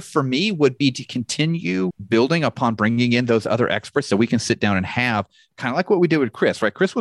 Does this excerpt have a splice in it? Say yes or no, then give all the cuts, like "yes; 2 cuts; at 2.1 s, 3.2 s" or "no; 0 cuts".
yes; 1 cut; at 2.0 s